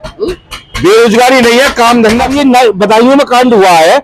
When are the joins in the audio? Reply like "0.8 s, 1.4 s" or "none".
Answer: 2.3 s